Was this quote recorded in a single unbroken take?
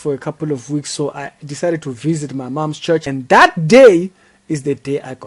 yes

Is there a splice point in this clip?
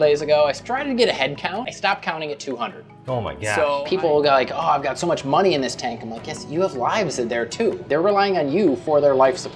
yes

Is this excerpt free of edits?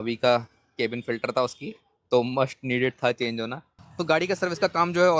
yes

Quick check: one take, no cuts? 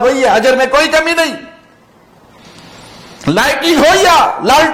yes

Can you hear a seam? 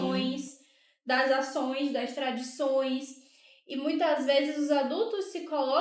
no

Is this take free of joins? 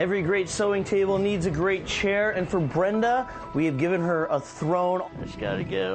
no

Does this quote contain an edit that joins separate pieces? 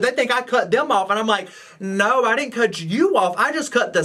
no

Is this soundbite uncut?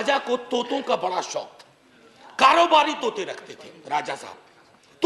yes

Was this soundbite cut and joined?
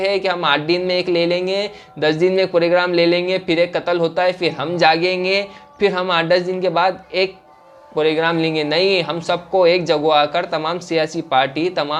no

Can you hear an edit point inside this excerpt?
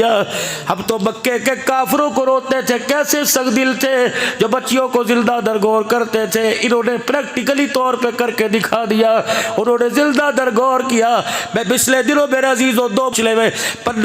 yes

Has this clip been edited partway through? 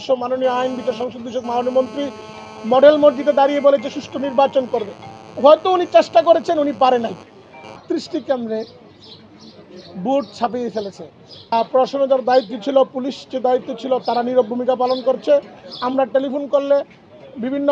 yes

